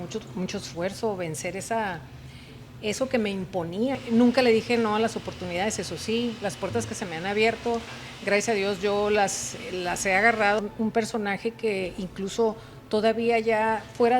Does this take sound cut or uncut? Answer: cut